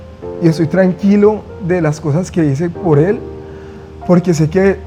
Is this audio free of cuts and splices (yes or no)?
yes